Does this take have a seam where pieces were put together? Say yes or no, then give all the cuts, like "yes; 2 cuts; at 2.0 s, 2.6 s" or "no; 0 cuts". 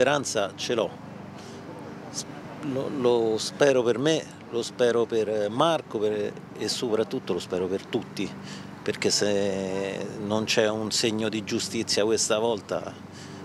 no; 0 cuts